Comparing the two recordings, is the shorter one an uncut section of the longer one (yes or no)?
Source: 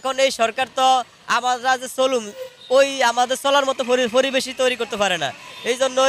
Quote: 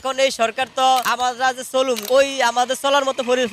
no